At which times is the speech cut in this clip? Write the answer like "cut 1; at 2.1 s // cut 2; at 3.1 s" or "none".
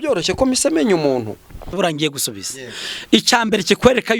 cut 1; at 1.7 s

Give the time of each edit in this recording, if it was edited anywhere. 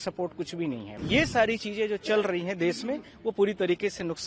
cut 1; at 0.9 s

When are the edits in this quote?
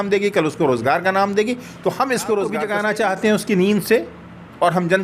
cut 1; at 2.6 s

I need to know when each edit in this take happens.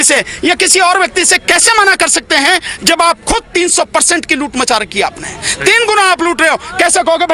none

